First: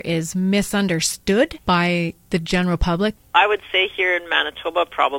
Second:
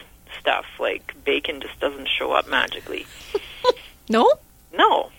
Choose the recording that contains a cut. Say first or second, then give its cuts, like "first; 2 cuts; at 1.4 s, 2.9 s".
first; 2 cuts; at 1.6 s, 3.2 s